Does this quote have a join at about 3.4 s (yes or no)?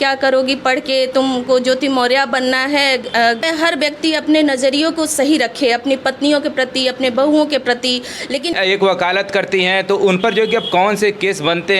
yes